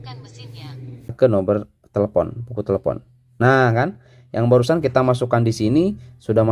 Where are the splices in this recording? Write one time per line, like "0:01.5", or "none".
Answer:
0:01.2